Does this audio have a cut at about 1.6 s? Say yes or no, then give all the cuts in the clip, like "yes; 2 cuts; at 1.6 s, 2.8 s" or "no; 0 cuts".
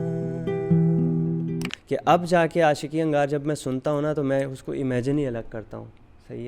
yes; 1 cut; at 1.6 s